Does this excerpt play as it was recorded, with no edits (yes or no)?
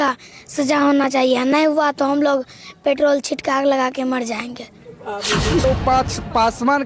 no